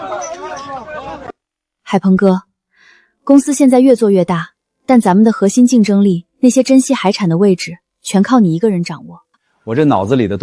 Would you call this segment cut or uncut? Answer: cut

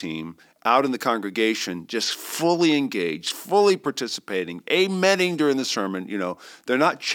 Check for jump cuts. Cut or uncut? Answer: uncut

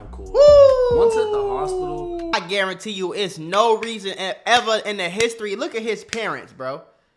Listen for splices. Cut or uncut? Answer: cut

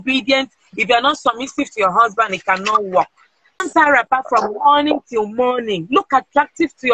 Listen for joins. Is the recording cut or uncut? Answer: cut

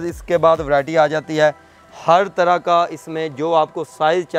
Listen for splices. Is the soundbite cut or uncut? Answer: uncut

